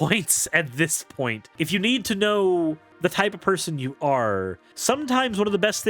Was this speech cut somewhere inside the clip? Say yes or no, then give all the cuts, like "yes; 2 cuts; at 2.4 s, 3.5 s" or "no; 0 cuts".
yes; 3 cuts; at 1.4 s, 2.9 s, 4.6 s